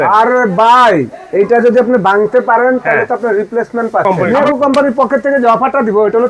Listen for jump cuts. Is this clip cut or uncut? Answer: cut